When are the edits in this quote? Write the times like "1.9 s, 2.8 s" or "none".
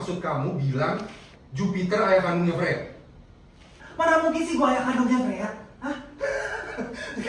3.8 s